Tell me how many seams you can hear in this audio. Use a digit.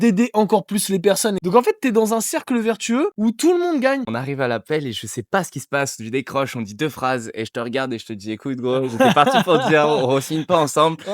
3